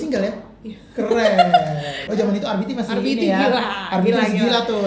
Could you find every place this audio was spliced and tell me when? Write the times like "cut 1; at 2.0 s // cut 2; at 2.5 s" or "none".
cut 1; at 1.9 s

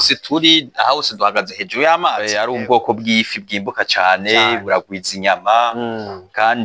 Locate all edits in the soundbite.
cut 1; at 2.2 s

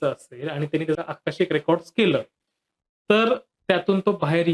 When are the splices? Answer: cut 1; at 1.0 s

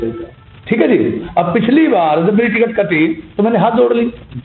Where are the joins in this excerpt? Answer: none

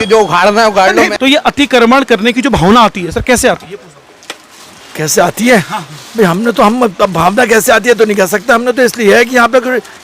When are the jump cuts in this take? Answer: cut 1; at 1.1 s

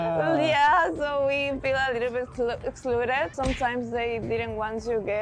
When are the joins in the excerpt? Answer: cut 1; at 3.3 s

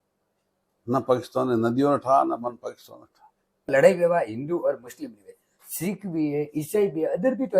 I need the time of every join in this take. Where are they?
cut 1; at 3.7 s

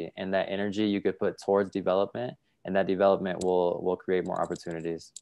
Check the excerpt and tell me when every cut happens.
none

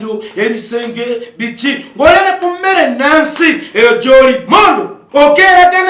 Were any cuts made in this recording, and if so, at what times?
cut 1; at 4.9 s

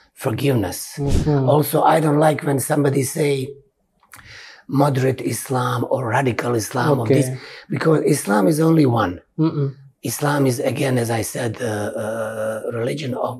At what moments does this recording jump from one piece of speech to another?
cut 1; at 1.1 s

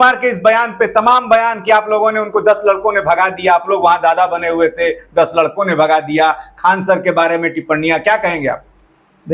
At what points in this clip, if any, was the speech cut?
none

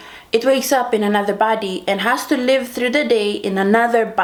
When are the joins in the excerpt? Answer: none

